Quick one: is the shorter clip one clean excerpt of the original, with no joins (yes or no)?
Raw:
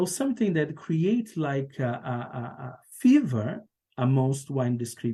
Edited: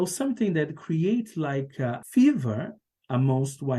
no